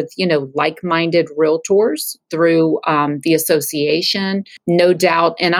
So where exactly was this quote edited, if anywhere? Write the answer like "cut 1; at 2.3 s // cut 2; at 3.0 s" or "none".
cut 1; at 4.5 s